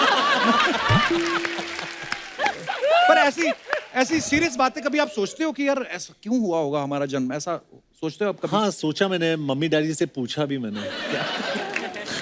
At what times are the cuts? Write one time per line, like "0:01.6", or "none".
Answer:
none